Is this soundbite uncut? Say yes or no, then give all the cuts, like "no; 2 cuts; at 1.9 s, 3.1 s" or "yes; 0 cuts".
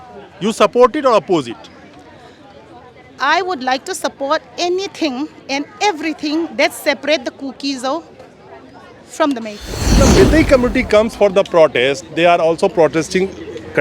no; 1 cut; at 10.0 s